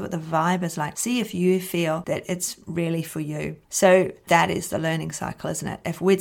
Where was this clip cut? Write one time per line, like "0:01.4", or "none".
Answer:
0:03.6
0:04.2